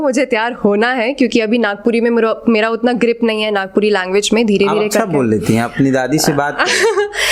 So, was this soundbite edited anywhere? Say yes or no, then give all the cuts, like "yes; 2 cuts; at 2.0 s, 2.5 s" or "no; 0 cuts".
no; 0 cuts